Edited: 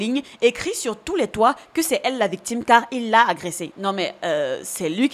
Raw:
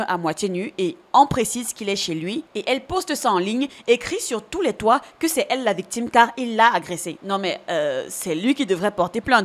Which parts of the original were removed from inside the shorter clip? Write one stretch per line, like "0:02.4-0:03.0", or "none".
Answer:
none